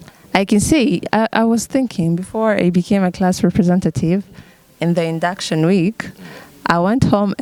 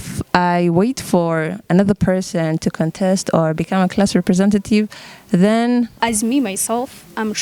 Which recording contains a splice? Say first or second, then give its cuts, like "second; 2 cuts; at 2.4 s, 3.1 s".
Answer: second; 1 cut; at 5.9 s